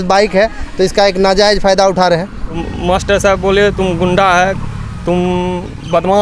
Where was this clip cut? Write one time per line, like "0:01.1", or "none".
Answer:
0:02.6